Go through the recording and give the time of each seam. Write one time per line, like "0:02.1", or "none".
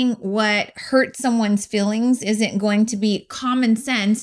none